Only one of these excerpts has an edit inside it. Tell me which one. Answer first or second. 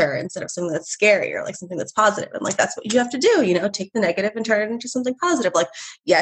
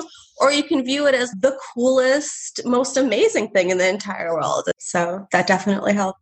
second